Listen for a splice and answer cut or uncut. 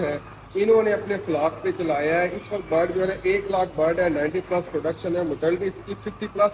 uncut